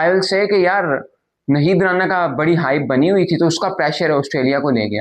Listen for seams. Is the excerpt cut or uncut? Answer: uncut